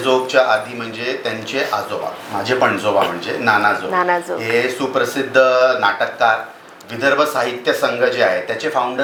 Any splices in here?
no; 0 cuts

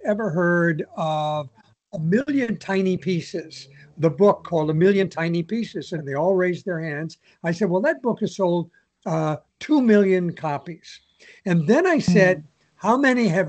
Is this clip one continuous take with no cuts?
no; 1 cut; at 6.0 s

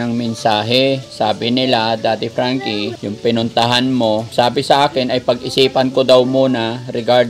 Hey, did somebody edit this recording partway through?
yes; 3 cuts; at 1.1 s, 3.0 s, 4.3 s

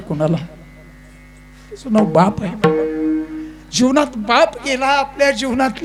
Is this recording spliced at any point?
no; 0 cuts

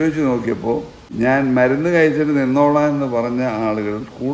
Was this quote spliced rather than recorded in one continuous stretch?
yes; 1 cut; at 1.0 s

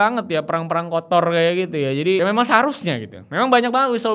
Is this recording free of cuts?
no; 1 cut; at 2.2 s

